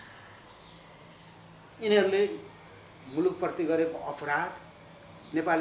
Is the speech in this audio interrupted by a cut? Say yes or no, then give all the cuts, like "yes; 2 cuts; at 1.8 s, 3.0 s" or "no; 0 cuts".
no; 0 cuts